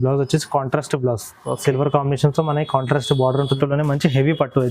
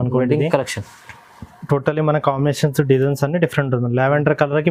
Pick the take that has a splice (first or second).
first